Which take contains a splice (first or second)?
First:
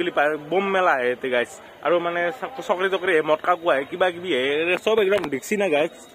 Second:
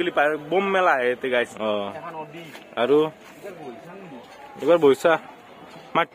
second